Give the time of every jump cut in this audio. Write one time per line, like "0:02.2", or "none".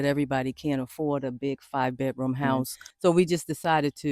0:02.8